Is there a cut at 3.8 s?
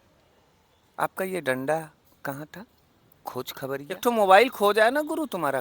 yes; 1 cut; at 3.8 s

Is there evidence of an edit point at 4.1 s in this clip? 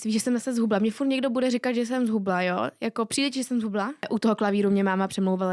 yes; 1 cut; at 4.1 s

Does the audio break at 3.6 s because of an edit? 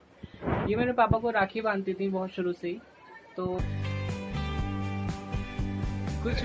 yes; 1 cut; at 3.6 s

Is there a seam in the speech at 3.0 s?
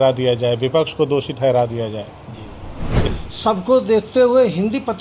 yes; 1 cut; at 3.0 s

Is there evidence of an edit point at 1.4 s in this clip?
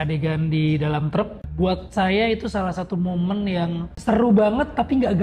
yes; 2 cuts; at 1.4 s, 3.9 s

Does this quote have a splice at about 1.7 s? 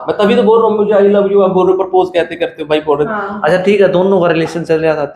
no; 1 cut; at 3.1 s

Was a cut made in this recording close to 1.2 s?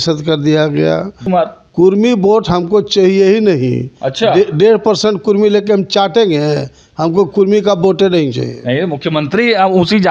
yes; 1 cut; at 1.2 s

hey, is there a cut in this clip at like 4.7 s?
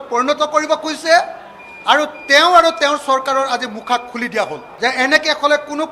yes; 1 cut; at 4.7 s

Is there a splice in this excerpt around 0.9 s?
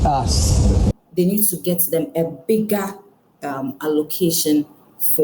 yes; 1 cut; at 0.9 s

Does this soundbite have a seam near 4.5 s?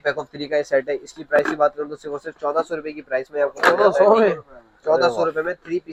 no; 0 cuts

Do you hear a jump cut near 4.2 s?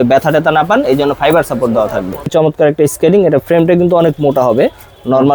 no; 1 cut; at 2.3 s

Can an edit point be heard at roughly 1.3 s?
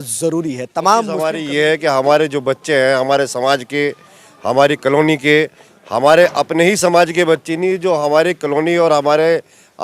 yes; 1 cut; at 1.3 s

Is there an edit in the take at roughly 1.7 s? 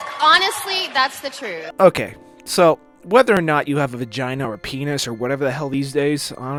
no; 0 cuts

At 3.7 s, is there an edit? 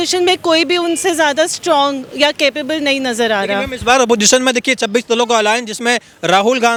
no; 0 cuts

